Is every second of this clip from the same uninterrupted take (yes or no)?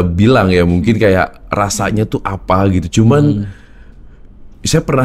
yes